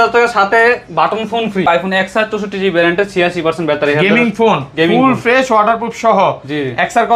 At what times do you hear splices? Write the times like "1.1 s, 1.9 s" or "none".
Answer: 1.7 s